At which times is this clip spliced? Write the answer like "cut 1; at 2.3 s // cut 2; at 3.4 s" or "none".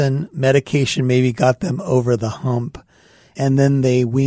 cut 1; at 3.3 s